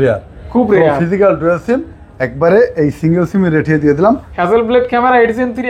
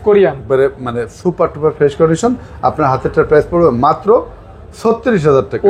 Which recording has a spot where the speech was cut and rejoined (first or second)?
first